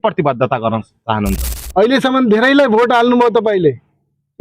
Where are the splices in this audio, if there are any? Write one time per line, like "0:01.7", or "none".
0:01.5